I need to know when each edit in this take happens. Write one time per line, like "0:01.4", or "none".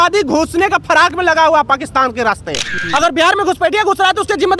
0:02.8